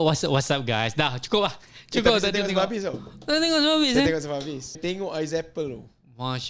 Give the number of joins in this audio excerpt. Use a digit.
1